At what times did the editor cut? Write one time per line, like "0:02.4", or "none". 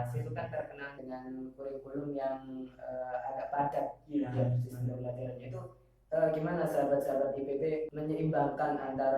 0:00.9
0:07.9

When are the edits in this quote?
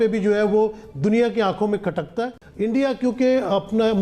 0:02.4

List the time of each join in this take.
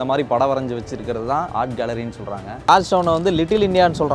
0:01.5
0:02.7

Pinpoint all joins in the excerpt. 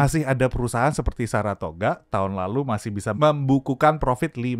0:03.2

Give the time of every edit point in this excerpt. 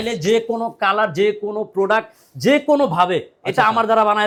none

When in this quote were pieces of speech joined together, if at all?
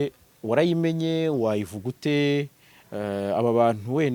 none

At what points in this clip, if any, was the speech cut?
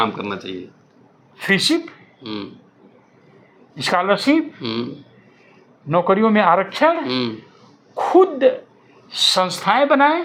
none

